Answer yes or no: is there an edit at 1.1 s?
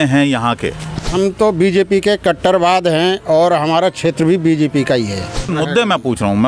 yes